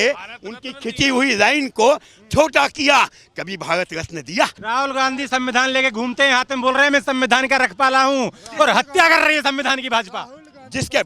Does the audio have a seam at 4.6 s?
yes; 1 cut; at 4.6 s

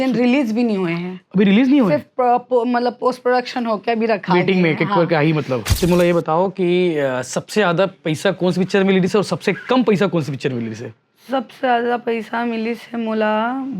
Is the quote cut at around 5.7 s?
yes; 1 cut; at 5.7 s

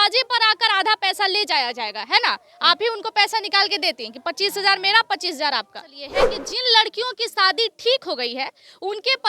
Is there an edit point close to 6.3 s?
yes; 1 cut; at 6.3 s

